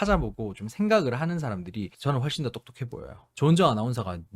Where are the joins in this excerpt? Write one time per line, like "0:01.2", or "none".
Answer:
0:03.3